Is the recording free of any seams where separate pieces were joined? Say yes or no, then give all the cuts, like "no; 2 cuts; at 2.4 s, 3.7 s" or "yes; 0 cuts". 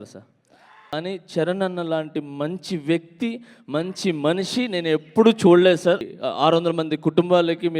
no; 2 cuts; at 0.9 s, 6.1 s